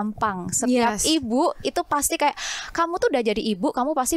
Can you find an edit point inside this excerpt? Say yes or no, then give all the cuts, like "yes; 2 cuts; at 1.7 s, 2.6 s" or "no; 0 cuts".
no; 0 cuts